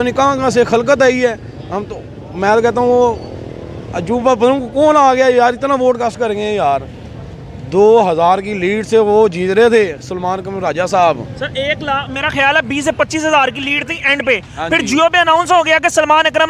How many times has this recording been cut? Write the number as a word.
zero